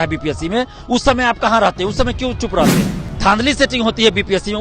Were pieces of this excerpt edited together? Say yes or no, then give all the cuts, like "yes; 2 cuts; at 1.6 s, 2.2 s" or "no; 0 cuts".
yes; 1 cut; at 3.0 s